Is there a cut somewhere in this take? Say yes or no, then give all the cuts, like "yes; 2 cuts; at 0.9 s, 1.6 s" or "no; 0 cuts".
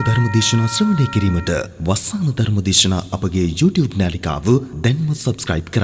no; 0 cuts